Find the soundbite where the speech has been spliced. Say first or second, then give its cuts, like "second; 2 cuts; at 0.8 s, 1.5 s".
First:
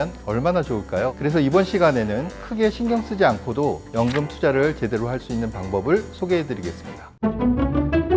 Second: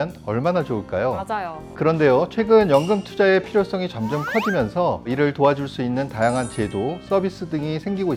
first; 2 cuts; at 1.1 s, 7.1 s